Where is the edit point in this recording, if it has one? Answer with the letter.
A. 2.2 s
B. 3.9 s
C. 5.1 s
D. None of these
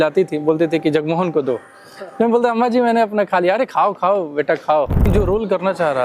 C